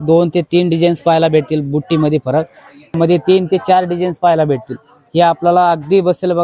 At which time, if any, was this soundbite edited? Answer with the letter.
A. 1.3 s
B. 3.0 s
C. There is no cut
B